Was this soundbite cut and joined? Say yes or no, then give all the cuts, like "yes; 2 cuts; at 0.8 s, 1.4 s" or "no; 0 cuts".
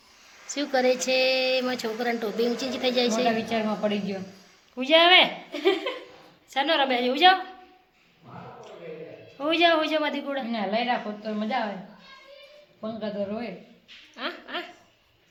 no; 0 cuts